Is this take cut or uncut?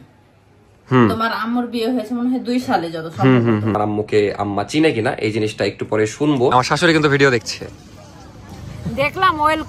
cut